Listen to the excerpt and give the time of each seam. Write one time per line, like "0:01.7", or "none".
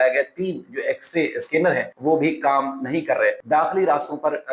0:01.9
0:03.4